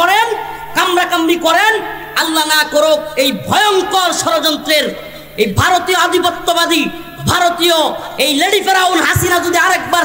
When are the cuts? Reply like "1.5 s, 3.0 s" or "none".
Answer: none